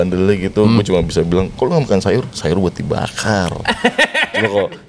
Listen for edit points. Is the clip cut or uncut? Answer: uncut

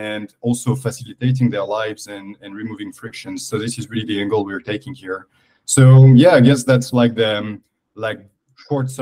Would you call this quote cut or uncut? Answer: uncut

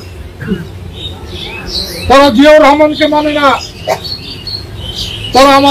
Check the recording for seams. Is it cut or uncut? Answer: uncut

